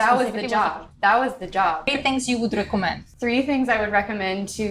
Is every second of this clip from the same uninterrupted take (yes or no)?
no